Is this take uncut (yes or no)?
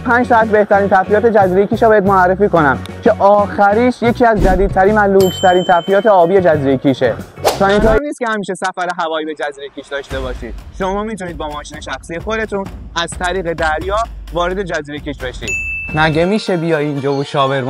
no